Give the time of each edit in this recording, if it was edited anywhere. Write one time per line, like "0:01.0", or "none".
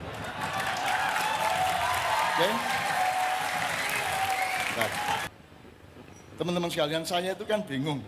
0:05.3

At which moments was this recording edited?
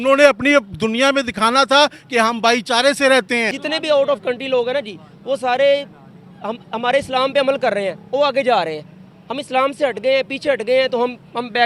0:03.6

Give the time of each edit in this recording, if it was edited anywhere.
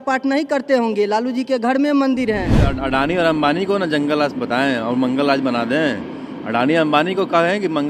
0:02.7

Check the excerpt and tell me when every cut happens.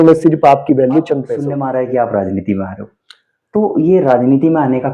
0:01.4

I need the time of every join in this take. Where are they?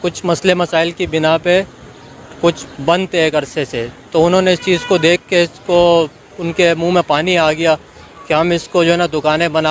none

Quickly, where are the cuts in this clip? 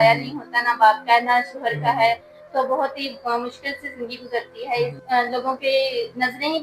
0:05.0

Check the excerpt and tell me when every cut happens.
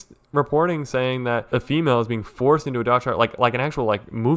0:01.5

